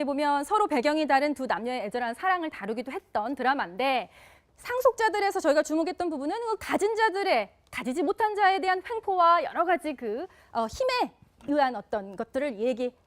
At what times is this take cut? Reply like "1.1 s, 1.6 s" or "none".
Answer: 2.2 s

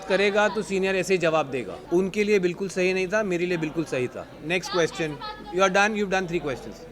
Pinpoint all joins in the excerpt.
none

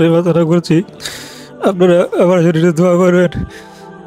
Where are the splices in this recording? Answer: none

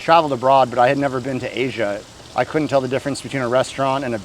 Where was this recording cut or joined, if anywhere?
2.1 s

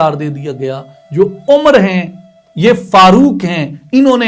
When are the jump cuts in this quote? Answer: 0.9 s

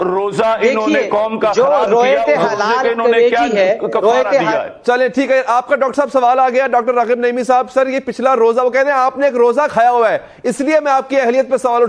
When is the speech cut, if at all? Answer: none

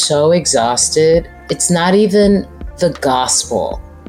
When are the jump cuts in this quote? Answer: 1.4 s, 2.6 s

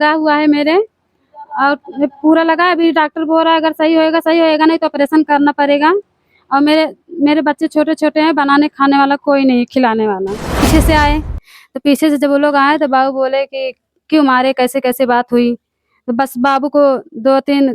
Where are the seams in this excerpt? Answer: 10.6 s

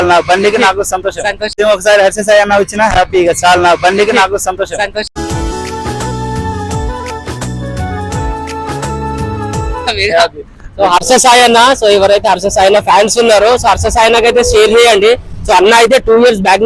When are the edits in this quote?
none

